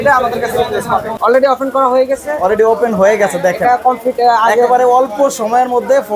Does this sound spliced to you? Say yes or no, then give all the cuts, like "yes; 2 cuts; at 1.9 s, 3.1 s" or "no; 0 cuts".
yes; 1 cut; at 1.1 s